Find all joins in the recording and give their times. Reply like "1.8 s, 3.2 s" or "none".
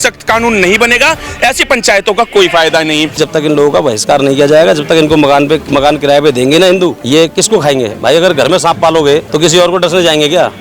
3.1 s, 5.6 s, 7.0 s, 9.3 s